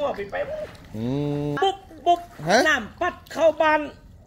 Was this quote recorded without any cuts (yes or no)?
no